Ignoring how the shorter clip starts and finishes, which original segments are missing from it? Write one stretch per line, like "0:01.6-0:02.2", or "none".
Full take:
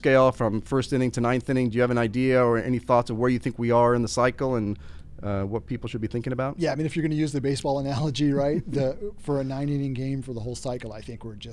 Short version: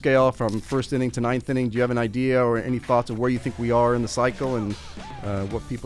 none